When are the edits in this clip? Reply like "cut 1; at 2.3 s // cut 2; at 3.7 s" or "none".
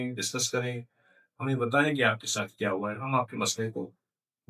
none